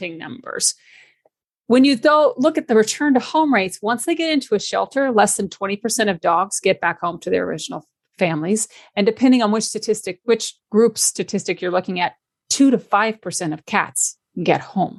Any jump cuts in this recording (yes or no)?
no